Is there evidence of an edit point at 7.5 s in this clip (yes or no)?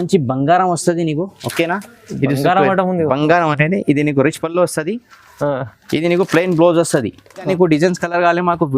yes